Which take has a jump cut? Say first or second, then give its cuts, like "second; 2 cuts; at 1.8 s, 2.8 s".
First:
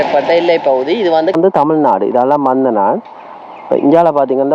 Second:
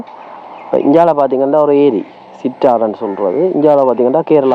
first; 1 cut; at 1.3 s